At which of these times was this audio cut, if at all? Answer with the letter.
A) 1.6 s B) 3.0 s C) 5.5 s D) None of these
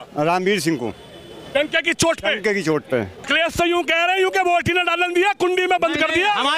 B